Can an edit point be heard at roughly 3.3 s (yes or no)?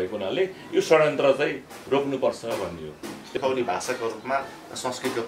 yes